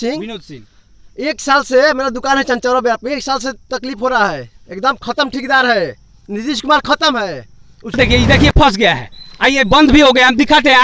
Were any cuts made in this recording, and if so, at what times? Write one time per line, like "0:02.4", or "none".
0:08.0